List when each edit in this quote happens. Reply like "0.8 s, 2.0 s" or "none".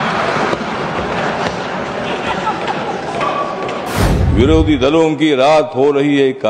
4.1 s